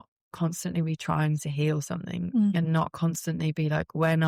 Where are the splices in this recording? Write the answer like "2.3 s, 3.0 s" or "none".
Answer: none